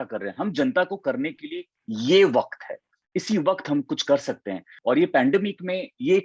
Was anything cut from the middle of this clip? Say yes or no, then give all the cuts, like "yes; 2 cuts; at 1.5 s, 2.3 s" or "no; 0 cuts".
yes; 1 cut; at 4.7 s